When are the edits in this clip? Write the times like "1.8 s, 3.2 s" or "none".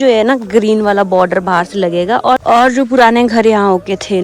2.4 s